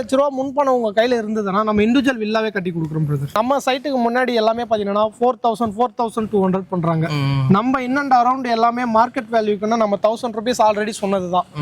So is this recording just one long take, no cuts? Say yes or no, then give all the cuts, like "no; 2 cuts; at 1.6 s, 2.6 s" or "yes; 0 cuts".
no; 1 cut; at 3.3 s